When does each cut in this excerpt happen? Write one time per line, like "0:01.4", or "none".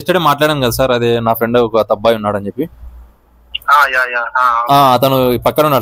none